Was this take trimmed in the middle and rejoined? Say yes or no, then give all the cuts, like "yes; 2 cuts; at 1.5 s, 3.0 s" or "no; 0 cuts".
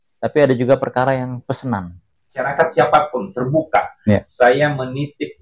yes; 1 cut; at 2.4 s